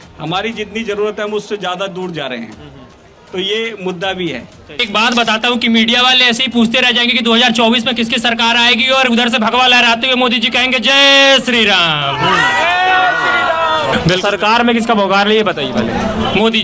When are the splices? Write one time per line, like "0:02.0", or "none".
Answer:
0:04.8
0:13.9